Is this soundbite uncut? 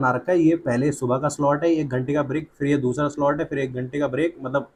yes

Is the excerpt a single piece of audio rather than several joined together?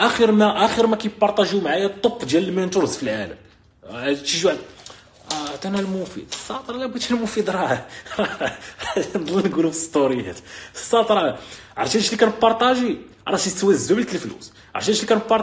yes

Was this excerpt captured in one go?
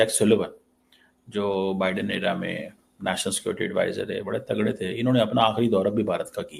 yes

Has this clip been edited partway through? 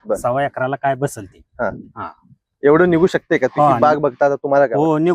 no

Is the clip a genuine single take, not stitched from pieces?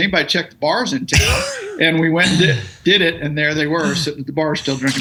yes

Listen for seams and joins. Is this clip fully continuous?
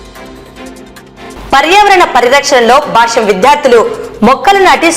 no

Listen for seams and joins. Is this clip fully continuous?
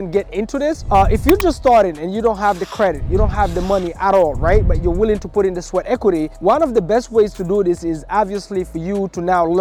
yes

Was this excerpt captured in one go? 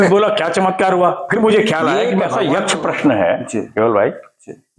no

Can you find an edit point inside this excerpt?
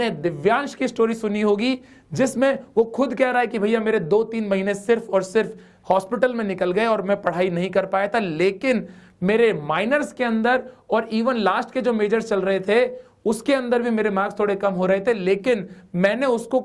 no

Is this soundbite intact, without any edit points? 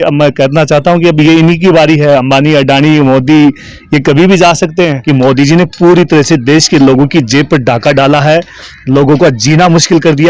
no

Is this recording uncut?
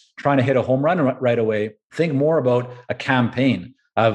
no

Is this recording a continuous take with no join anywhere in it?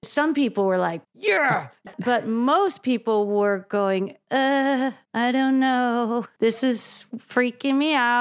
no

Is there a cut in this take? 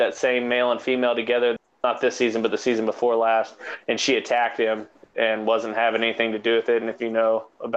yes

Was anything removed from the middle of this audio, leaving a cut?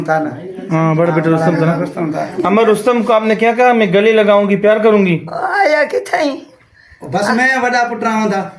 yes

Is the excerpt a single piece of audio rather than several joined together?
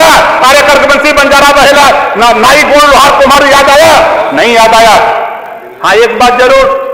no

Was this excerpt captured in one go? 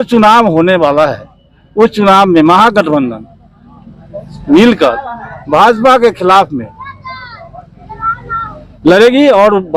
yes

